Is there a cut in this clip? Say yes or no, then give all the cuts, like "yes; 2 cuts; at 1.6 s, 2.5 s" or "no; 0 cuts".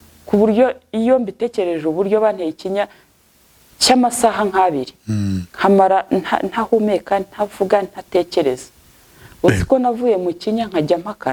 no; 0 cuts